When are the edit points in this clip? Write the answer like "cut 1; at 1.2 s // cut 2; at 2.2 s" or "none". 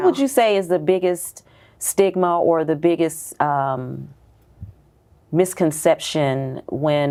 none

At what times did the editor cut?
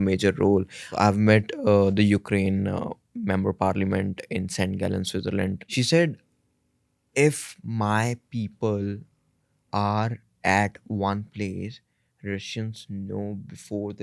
cut 1; at 0.9 s // cut 2; at 5.6 s

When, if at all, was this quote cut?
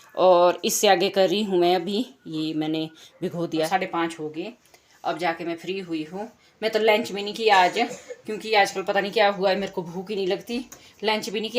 cut 1; at 3.7 s

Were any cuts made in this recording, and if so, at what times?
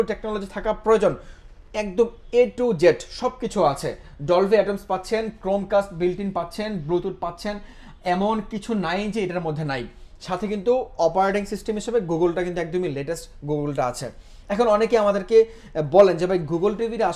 none

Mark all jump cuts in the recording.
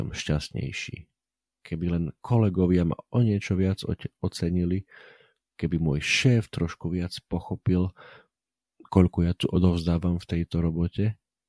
none

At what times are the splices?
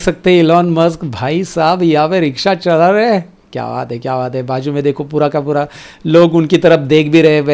none

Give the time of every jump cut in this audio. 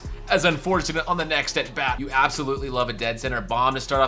cut 1; at 2.0 s

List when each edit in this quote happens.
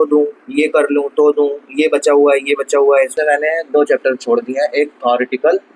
cut 1; at 3.1 s

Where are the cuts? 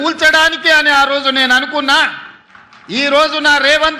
none

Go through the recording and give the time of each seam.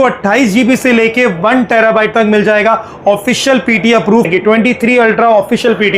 cut 1; at 4.3 s

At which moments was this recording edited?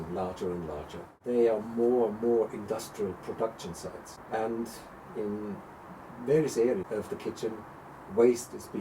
cut 1; at 1.2 s // cut 2; at 4.1 s // cut 3; at 6.9 s

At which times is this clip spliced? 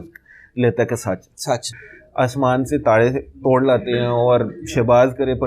cut 1; at 1.8 s

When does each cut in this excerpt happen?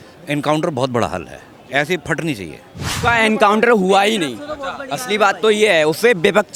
none

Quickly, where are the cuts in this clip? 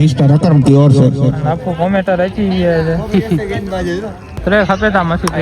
cut 1; at 4.4 s

